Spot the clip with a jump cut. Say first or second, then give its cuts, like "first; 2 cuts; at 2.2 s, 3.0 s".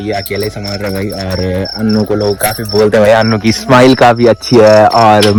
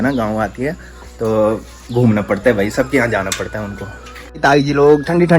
second; 1 cut; at 4.4 s